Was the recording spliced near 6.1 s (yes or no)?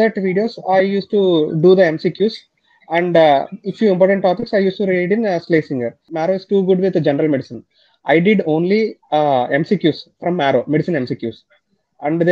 yes